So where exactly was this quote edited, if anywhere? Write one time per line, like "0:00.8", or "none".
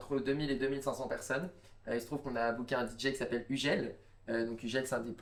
none